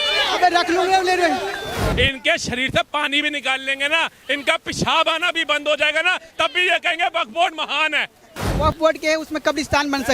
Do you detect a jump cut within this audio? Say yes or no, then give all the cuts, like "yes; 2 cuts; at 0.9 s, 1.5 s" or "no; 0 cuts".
yes; 2 cuts; at 1.9 s, 8.5 s